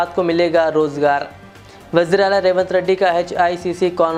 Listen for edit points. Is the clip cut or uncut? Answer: uncut